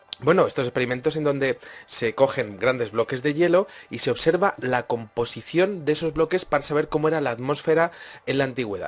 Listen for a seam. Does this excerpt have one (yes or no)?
yes